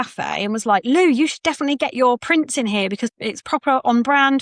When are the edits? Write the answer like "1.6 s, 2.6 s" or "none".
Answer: 3.1 s